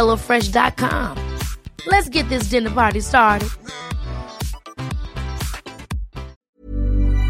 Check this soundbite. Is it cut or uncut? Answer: cut